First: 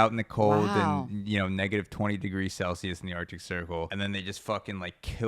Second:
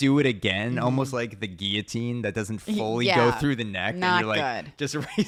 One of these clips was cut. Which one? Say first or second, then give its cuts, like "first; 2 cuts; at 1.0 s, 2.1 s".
first; 1 cut; at 3.9 s